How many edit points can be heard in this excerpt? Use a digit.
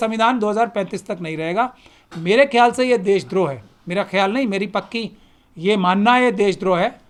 0